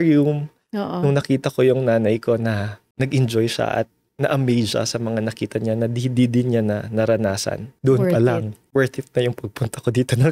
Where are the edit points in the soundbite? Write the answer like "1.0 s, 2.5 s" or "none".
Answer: 7.7 s